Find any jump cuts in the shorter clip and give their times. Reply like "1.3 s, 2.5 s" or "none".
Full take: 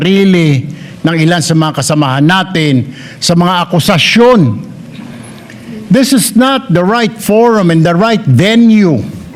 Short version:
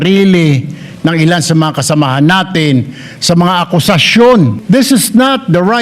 4.6 s